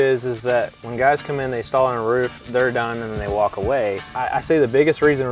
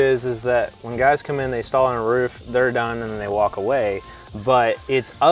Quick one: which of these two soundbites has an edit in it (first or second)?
first